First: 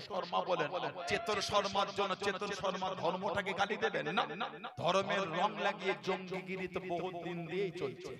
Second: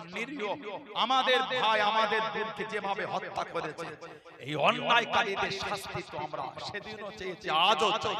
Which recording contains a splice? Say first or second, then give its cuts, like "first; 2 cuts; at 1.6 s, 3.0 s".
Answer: first; 2 cuts; at 1.0 s, 4.6 s